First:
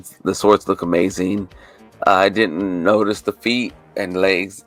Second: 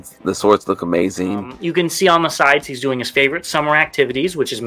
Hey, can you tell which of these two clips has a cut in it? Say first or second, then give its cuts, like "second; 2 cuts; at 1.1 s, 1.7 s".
second; 1 cut; at 1.6 s